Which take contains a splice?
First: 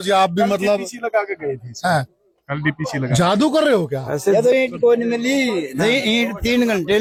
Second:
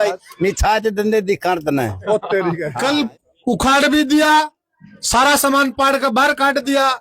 second; 1 cut; at 2.8 s

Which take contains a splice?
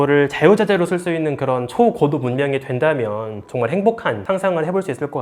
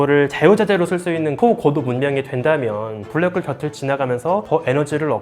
second; 2 cuts; at 1.3 s, 3.1 s

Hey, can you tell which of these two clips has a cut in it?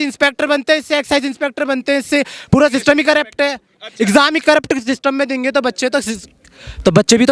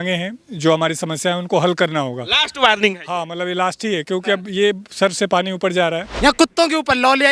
second; 1 cut; at 6.1 s

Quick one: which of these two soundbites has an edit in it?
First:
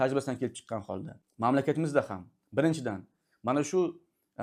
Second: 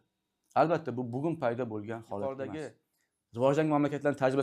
second; 1 cut; at 2.7 s

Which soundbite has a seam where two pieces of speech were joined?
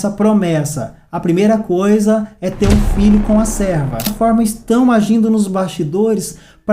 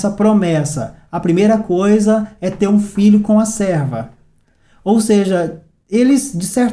first; 1 cut; at 4.1 s

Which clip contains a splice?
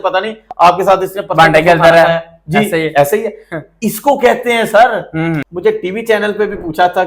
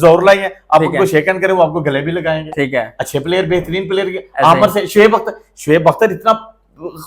first; 1 cut; at 5.5 s

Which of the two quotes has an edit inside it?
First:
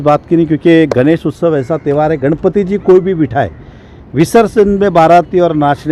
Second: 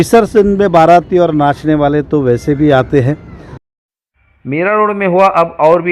second; 1 cut; at 3.7 s

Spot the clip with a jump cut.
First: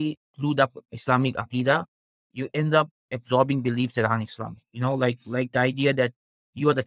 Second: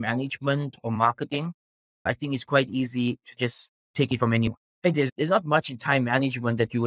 second; 2 cuts; at 2.1 s, 4.6 s

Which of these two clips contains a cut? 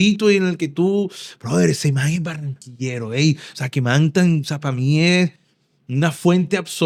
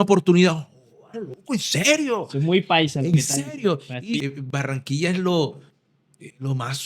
second; 1 cut; at 4.2 s

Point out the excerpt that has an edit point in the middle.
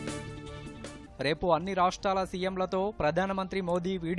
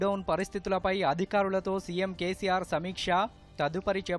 first; 1 cut; at 0.9 s

